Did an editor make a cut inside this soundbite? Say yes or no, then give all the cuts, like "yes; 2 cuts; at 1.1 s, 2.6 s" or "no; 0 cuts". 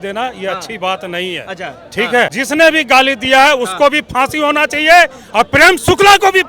yes; 1 cut; at 2.3 s